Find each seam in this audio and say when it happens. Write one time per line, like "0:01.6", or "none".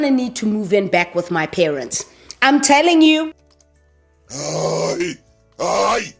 none